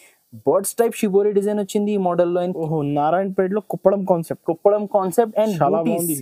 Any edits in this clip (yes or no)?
yes